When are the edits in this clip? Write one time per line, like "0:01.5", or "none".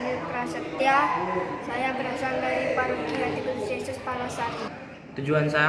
0:04.7

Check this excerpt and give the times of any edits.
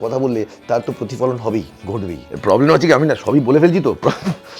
0:02.2

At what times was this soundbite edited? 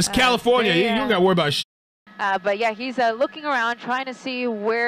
0:01.6

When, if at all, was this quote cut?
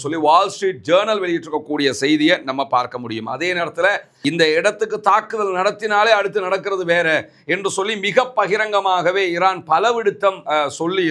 0:04.1

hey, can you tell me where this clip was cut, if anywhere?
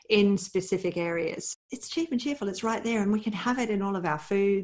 0:01.5

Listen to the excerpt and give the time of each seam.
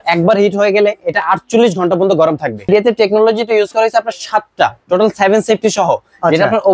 0:02.7

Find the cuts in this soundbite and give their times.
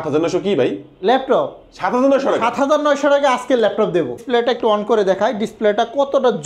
0:04.2

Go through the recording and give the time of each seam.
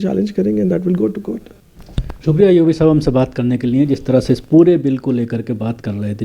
none

